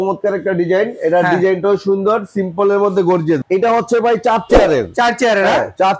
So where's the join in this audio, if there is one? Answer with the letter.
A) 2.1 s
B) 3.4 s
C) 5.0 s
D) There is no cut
B